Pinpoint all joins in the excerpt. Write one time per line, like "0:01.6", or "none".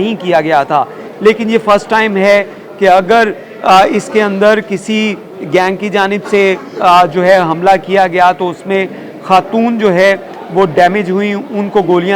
none